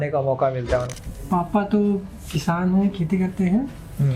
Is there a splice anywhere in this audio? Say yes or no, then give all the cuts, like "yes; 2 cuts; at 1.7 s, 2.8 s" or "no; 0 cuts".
yes; 1 cut; at 0.9 s